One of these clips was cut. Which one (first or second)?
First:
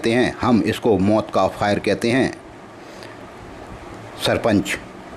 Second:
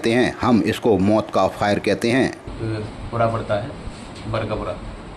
second